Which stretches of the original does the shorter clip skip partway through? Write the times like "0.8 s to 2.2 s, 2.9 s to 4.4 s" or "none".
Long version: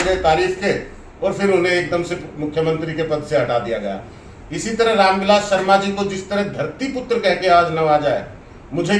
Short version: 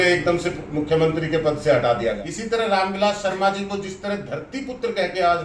3.9 s to 4.5 s